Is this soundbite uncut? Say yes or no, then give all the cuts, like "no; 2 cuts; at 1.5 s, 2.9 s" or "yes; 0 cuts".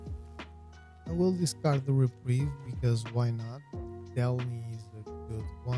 no; 1 cut; at 1.1 s